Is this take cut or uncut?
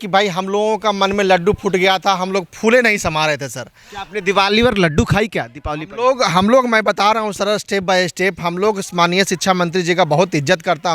uncut